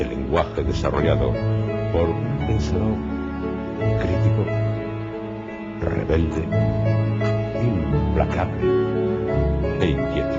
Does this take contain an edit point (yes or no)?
yes